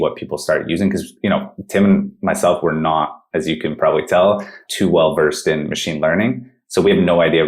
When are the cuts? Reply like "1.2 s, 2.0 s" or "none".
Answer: none